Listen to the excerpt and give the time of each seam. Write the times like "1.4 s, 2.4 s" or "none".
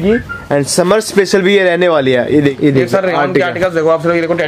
2.5 s